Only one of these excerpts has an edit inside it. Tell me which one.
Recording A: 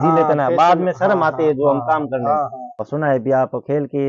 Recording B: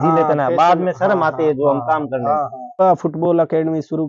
B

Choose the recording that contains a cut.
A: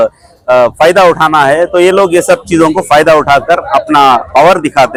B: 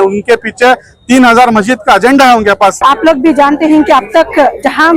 B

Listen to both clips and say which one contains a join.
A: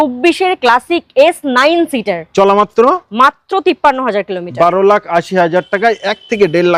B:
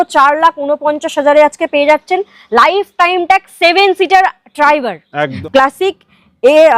B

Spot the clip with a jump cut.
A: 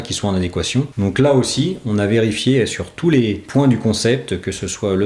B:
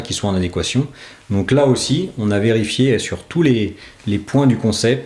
A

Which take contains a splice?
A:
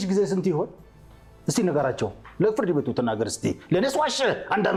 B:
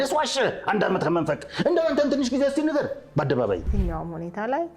B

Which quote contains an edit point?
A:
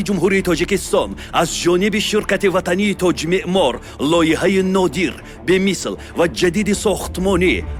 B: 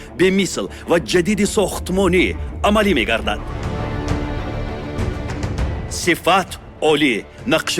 B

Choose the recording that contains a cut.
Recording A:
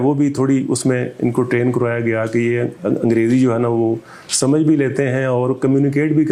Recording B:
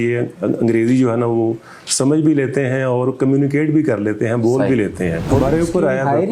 B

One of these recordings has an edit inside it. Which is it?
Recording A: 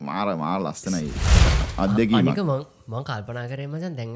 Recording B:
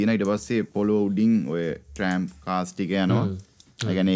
A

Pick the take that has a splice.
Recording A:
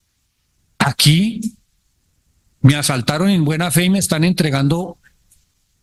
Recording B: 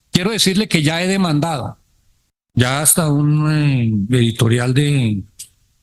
B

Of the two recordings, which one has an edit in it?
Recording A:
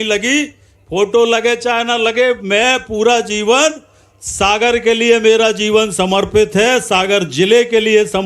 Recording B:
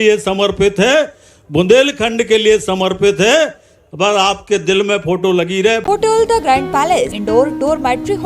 B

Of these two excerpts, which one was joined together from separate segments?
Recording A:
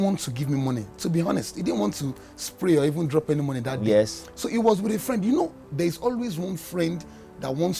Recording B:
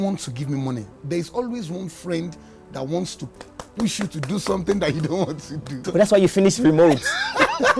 B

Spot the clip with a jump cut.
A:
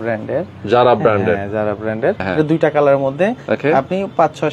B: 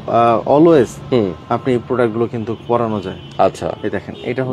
A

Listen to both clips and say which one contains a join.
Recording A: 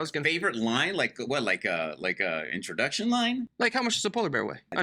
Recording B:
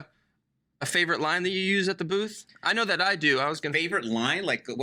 A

